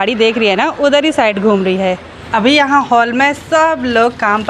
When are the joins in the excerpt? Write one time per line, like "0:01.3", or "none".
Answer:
0:02.2